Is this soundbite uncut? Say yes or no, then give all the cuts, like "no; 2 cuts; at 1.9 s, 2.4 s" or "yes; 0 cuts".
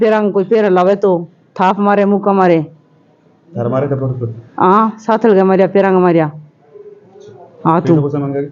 yes; 0 cuts